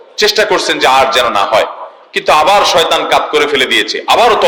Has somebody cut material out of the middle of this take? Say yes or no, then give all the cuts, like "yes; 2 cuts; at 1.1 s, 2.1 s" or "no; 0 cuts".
no; 0 cuts